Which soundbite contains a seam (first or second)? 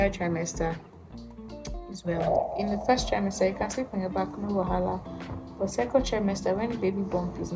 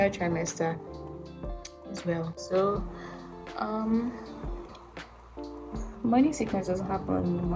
first